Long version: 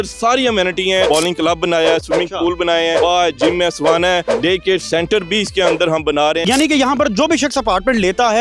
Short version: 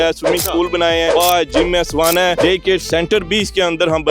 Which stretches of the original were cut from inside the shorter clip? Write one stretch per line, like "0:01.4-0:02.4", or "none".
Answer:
0:04.3-0:04.4